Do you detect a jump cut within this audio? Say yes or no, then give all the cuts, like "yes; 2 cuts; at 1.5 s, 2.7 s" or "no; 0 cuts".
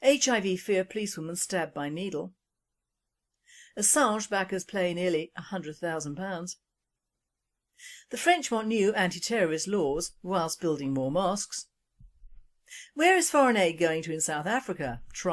yes; 1 cut; at 6.2 s